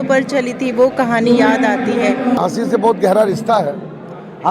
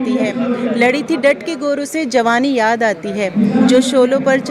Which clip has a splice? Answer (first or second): first